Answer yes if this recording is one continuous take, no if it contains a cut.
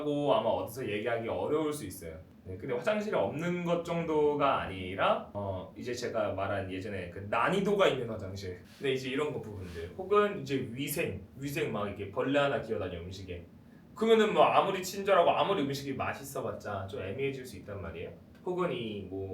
yes